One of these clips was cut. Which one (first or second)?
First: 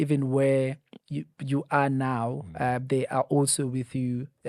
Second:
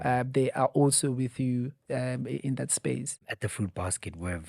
second